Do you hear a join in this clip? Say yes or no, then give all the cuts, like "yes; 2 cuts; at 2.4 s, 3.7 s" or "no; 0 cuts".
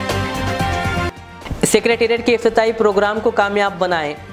no; 0 cuts